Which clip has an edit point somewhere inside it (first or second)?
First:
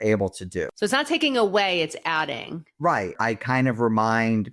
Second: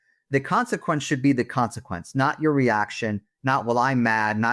first